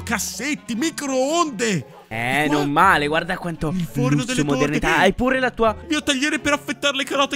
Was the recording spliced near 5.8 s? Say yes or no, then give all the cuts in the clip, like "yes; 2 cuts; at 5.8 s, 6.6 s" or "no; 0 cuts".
yes; 1 cut; at 5.8 s